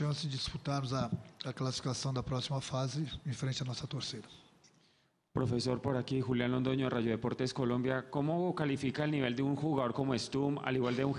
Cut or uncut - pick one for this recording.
uncut